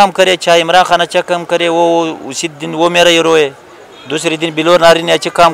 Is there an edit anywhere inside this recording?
no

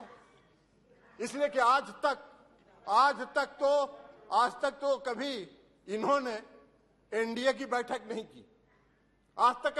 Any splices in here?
no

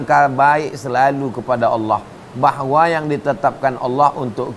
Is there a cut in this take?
no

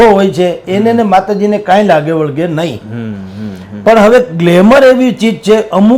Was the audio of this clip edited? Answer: no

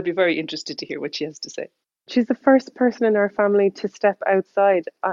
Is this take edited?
yes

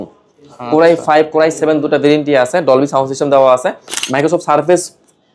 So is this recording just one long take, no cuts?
no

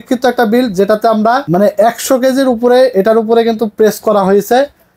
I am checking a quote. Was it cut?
yes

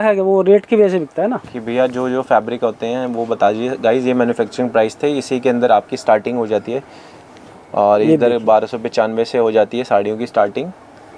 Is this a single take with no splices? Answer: yes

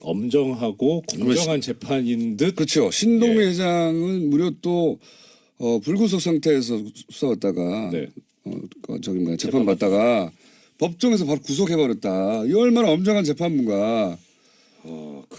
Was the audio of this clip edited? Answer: yes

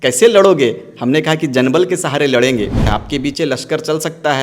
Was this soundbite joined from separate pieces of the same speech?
yes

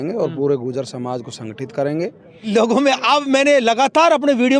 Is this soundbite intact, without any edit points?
no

